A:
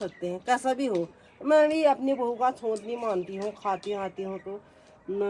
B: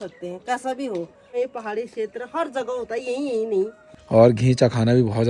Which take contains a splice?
B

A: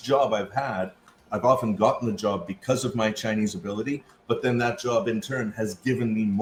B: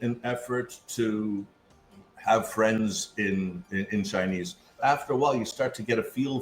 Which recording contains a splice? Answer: B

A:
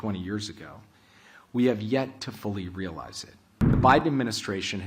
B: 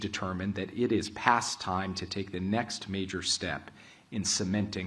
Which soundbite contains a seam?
A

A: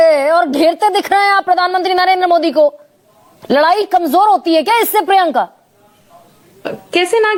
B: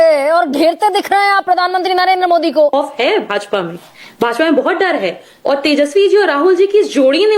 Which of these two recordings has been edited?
B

